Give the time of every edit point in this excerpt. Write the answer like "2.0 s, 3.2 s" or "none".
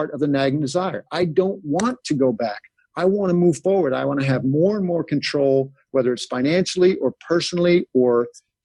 none